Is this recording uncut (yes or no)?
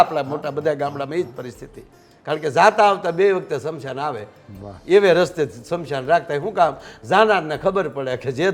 yes